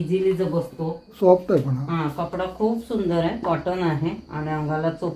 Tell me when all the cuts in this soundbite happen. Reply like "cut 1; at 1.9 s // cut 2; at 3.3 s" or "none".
cut 1; at 1.2 s